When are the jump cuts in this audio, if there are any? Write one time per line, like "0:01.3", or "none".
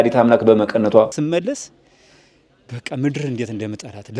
0:01.2